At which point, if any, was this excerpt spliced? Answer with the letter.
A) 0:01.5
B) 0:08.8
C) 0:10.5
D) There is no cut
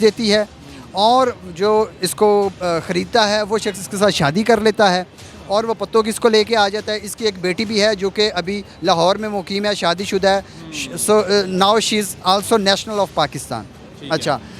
D